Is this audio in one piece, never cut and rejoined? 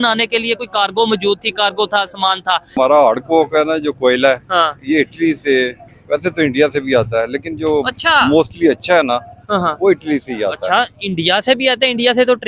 no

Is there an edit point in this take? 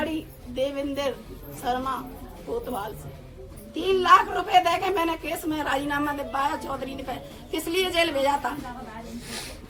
no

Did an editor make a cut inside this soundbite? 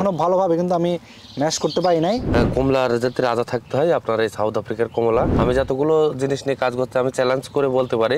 yes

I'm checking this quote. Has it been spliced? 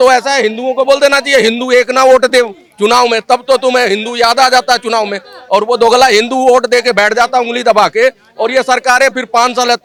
no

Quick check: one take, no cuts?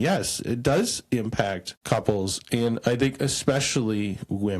no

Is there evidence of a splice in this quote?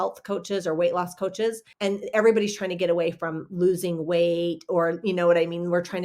yes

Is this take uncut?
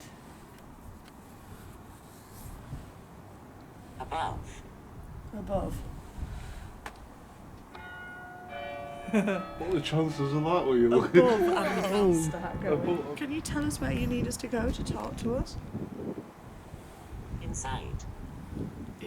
no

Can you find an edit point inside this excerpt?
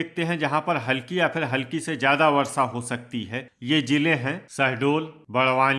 yes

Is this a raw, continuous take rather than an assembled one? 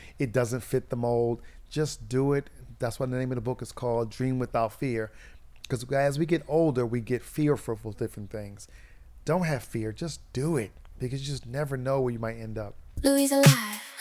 no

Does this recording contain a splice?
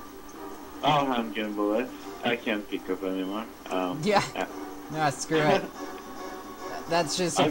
yes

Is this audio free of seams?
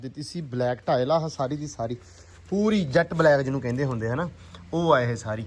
yes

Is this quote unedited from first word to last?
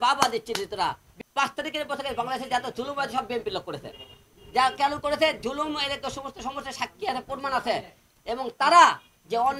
no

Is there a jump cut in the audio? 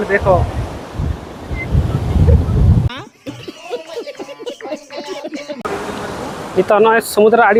no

